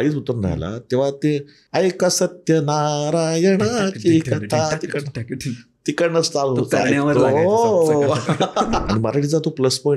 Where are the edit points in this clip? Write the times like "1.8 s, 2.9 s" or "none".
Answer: 1.6 s, 8.8 s